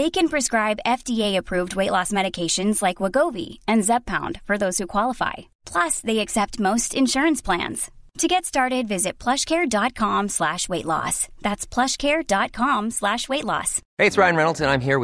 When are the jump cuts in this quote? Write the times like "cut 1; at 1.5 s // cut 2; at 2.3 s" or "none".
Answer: cut 1; at 13.8 s